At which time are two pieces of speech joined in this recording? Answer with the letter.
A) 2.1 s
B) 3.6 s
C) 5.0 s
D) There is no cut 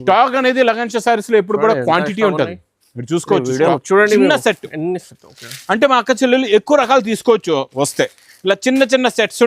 B